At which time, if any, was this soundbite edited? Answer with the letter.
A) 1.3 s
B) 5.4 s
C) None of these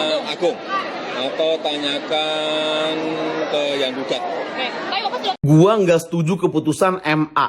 B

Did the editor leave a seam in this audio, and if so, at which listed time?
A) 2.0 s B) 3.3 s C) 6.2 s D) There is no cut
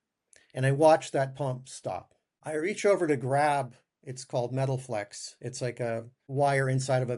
D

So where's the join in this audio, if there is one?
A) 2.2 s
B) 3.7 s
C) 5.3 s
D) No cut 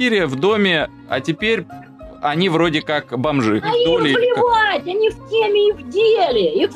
B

